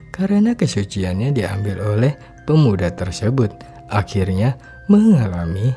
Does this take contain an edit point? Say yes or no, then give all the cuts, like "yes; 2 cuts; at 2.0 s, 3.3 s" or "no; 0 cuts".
no; 0 cuts